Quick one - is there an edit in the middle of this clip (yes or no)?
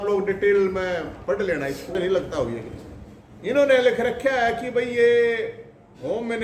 yes